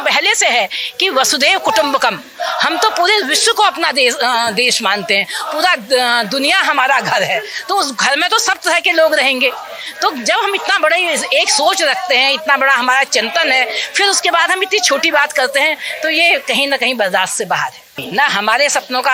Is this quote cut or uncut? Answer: uncut